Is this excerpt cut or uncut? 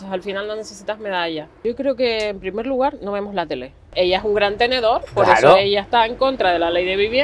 cut